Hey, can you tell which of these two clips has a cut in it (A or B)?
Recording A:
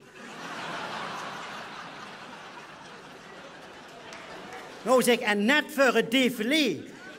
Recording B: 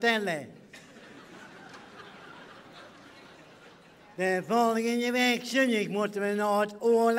B